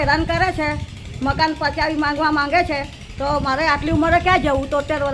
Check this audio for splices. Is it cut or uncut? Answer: uncut